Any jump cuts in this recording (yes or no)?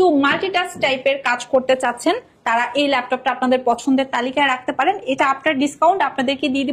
no